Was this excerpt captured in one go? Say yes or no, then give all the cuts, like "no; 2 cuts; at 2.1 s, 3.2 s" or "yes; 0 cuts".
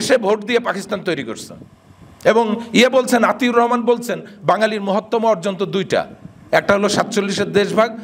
yes; 0 cuts